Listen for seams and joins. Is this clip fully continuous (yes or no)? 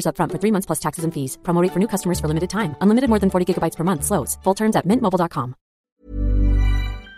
no